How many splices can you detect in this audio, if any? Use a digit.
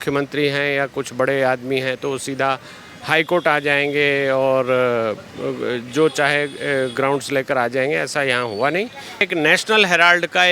1